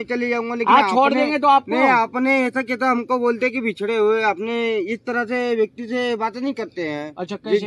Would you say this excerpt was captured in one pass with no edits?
yes; 0 cuts

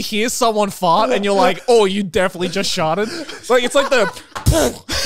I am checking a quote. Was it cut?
no; 0 cuts

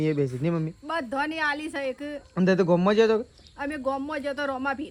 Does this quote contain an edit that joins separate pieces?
no; 0 cuts

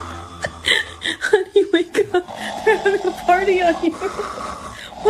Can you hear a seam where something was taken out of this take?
no; 0 cuts

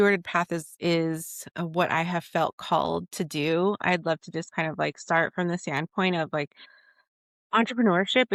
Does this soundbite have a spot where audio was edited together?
no; 0 cuts

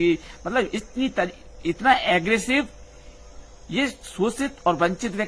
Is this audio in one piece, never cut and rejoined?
yes; 0 cuts

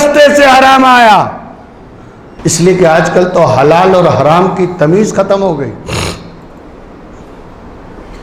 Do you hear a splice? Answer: no; 0 cuts

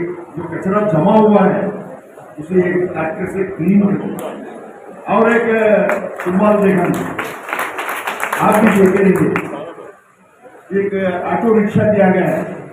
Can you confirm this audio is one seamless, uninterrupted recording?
yes; 0 cuts

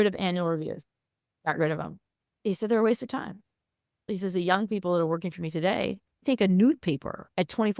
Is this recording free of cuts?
no; 3 cuts; at 1.3 s, 4.1 s, 6.2 s

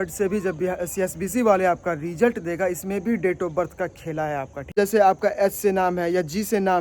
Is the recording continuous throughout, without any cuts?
no; 1 cut; at 4.7 s

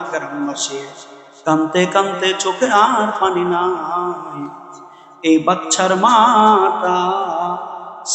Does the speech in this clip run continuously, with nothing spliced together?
yes; 0 cuts

